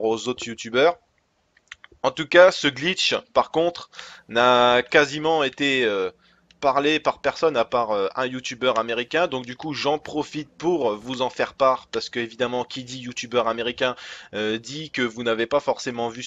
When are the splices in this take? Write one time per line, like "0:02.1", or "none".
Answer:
none